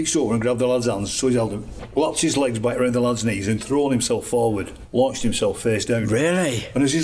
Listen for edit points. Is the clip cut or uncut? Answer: cut